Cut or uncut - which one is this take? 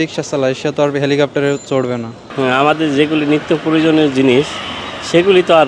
uncut